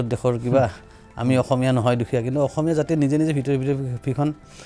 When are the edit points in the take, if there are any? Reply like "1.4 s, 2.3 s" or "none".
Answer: none